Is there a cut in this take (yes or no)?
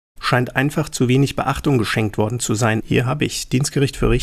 yes